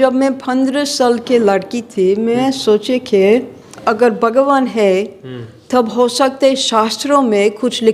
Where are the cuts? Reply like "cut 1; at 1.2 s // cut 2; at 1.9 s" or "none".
cut 1; at 3.7 s